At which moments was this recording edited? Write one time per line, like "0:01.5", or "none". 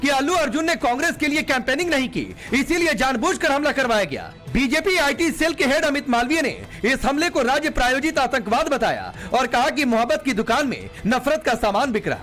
none